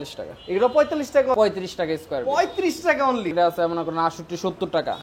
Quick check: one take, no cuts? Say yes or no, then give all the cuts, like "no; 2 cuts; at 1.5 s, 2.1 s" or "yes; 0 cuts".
no; 2 cuts; at 1.4 s, 3.3 s